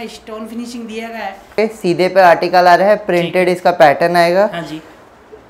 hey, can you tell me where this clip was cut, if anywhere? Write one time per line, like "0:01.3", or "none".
0:01.6